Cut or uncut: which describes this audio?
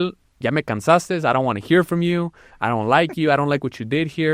uncut